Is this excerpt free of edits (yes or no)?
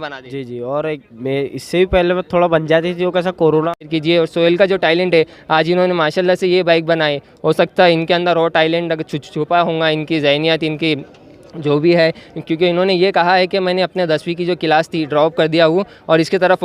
no